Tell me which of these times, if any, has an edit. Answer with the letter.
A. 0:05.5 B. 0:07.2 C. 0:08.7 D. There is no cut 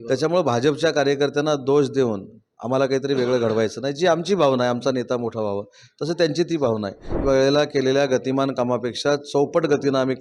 B